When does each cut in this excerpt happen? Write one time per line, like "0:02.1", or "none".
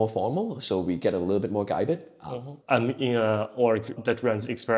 0:02.6